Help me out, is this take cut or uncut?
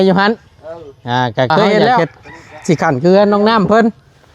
cut